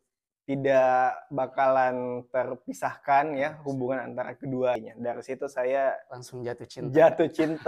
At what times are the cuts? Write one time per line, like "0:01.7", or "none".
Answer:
0:04.8